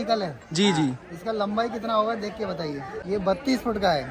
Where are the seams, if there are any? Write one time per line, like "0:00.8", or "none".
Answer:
0:02.9